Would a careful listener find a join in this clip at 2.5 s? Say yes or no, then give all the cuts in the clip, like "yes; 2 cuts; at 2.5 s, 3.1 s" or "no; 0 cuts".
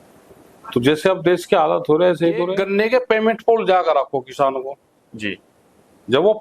yes; 1 cut; at 2.5 s